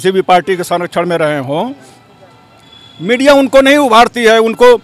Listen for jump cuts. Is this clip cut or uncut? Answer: uncut